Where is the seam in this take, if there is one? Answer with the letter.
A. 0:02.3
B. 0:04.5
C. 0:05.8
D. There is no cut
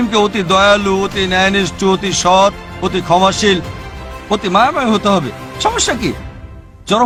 D